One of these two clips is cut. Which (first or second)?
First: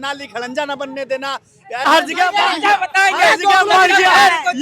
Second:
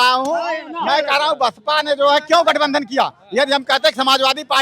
first